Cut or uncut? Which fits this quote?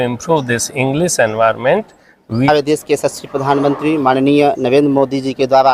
cut